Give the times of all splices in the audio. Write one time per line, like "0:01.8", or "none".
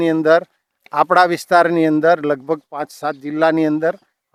none